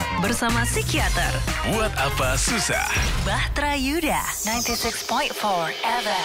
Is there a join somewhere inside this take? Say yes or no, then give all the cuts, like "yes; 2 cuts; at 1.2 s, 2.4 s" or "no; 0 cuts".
no; 0 cuts